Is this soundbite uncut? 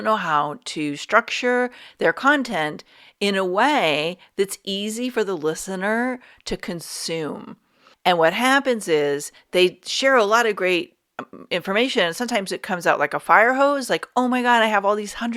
yes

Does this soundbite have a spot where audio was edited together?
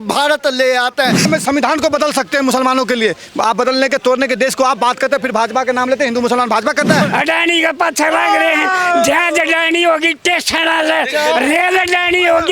yes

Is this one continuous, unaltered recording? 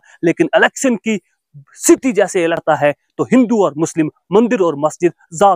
no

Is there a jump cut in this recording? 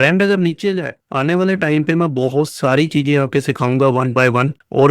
yes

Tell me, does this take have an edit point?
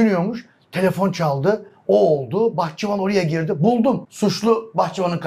yes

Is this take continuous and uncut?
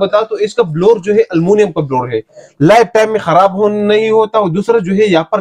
yes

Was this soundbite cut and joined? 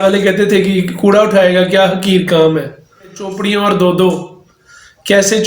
yes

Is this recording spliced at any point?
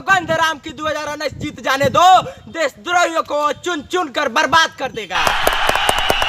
yes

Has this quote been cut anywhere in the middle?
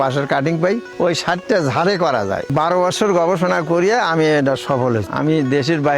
yes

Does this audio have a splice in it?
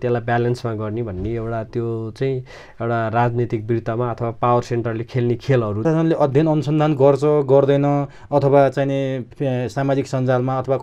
yes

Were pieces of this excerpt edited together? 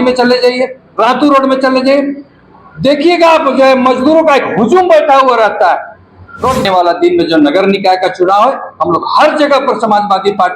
yes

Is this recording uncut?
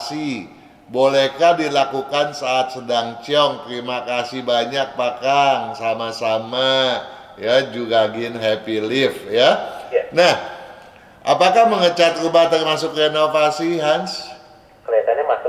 yes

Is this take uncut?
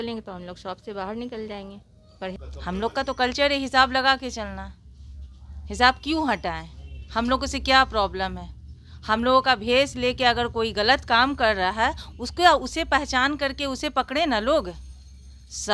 no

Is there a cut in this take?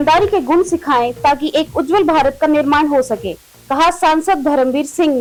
no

